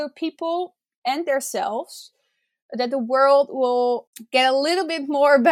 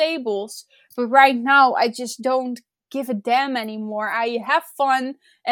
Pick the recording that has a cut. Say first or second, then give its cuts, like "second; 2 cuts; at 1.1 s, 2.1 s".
first; 1 cut; at 4.1 s